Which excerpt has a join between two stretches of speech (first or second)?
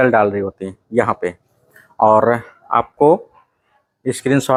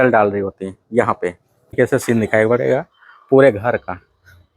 second